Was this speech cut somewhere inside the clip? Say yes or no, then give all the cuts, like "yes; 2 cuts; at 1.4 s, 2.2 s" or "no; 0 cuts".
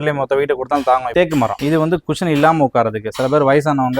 yes; 1 cut; at 1.5 s